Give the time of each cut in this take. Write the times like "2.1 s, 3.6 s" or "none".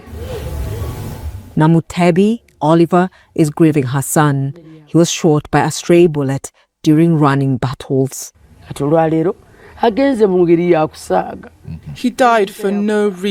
none